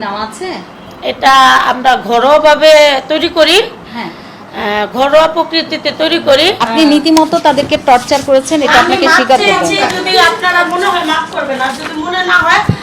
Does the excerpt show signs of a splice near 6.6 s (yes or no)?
yes